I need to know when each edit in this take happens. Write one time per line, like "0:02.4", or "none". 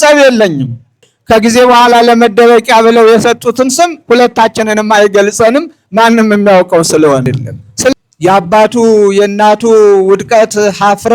0:01.1
0:07.9